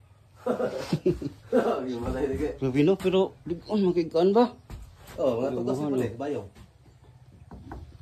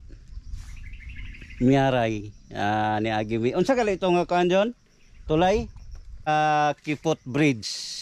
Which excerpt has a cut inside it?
second; 1 cut; at 6.3 s

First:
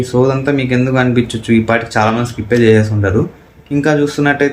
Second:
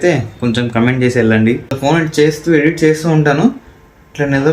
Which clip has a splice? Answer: second; 1 cut; at 1.8 s

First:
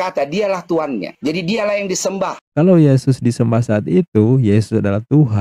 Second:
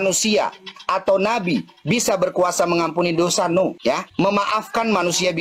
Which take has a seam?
first; 1 cut; at 2.4 s

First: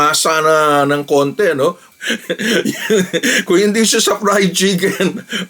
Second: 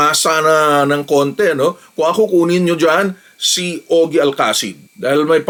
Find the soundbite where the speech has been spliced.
first; 1 cut; at 1.9 s

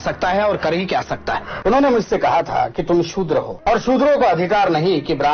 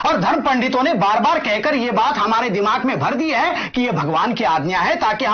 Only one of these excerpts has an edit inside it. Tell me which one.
first; 2 cuts; at 1.5 s, 3.5 s

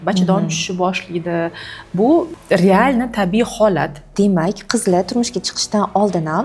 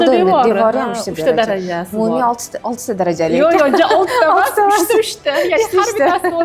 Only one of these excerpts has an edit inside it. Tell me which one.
first; 2 cuts; at 2.3 s, 4.1 s

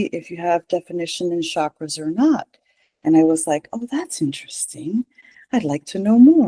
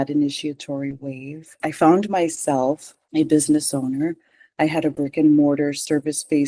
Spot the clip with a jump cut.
second; 2 cuts; at 1.6 s, 2.9 s

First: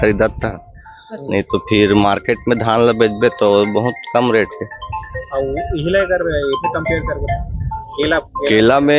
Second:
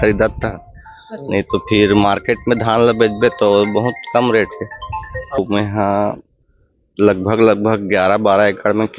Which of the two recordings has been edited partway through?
second; 1 cut; at 5.4 s

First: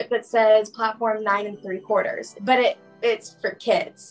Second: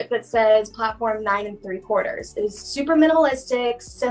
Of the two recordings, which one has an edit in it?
first; 1 cut; at 2.2 s

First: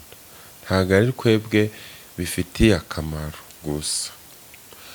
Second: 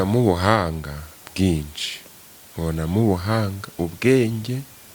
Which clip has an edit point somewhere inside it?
first; 1 cut; at 3.5 s

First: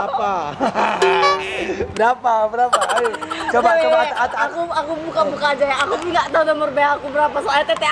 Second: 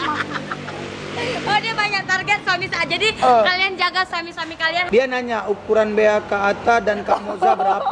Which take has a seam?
second; 1 cut; at 4.9 s

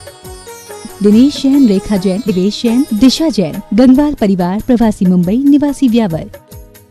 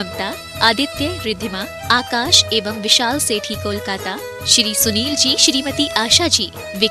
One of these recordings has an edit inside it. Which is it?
first; 1 cut; at 2.4 s

